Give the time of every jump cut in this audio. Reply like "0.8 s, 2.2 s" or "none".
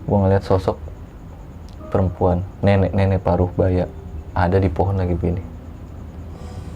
none